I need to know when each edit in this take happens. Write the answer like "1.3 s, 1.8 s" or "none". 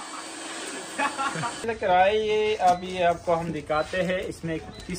1.7 s